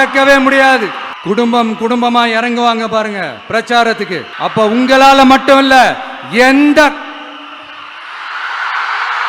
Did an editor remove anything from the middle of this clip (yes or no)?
yes